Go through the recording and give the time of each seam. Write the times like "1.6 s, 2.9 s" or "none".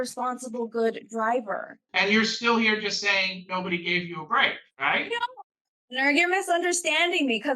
1.8 s, 4.7 s